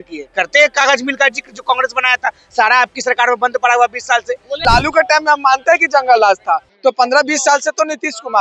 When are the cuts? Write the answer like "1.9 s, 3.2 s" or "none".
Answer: 4.6 s